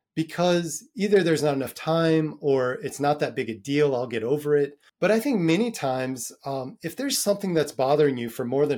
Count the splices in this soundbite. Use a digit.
1